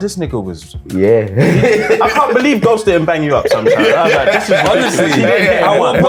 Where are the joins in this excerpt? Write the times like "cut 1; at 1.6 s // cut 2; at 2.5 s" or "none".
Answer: none